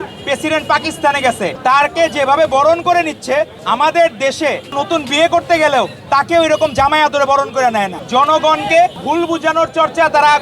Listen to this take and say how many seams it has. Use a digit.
5